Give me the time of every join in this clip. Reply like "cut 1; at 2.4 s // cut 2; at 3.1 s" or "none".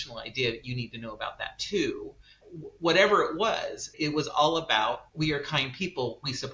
cut 1; at 2.4 s // cut 2; at 3.9 s // cut 3; at 5.1 s